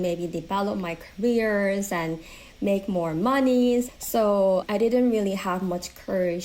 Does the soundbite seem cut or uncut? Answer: cut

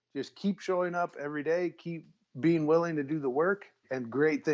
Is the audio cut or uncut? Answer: uncut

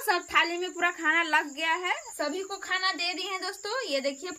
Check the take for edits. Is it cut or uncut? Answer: cut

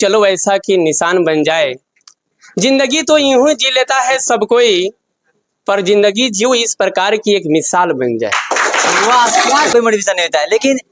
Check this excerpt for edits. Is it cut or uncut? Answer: cut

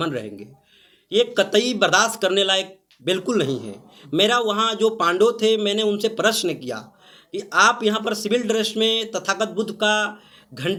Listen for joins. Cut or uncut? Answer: uncut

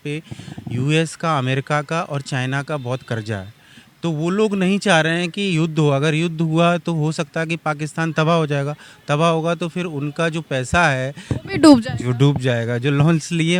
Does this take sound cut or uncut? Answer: uncut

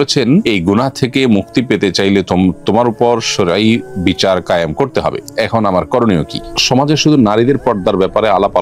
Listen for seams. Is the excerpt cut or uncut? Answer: cut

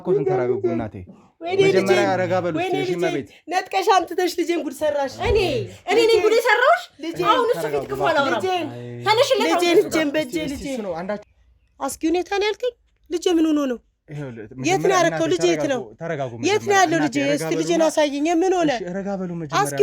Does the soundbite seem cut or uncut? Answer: cut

